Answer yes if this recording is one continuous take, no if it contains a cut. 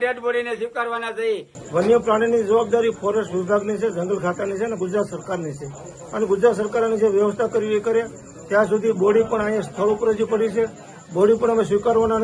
no